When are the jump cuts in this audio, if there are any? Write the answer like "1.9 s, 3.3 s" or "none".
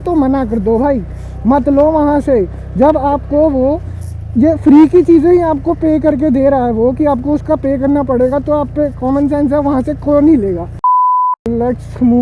none